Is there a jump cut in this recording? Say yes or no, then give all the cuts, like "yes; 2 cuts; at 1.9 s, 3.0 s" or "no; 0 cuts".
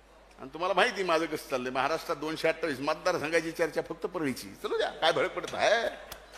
no; 0 cuts